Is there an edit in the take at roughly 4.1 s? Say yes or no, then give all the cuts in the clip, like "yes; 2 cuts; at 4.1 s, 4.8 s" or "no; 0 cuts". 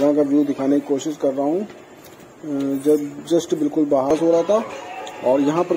yes; 1 cut; at 4.1 s